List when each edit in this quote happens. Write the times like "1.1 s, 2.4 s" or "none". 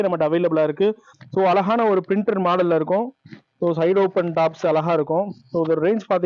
1.1 s